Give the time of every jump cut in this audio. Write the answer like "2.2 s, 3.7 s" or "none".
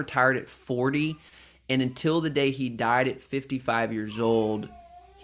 none